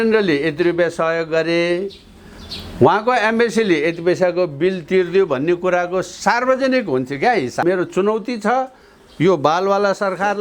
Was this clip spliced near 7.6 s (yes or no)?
yes